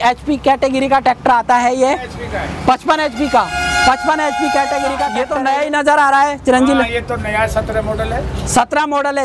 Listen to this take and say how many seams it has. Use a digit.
1